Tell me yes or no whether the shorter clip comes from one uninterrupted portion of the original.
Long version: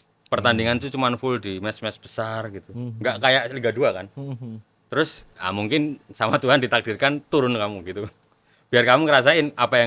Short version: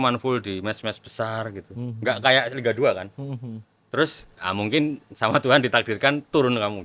yes